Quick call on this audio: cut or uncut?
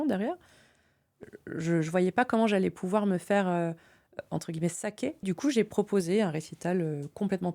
cut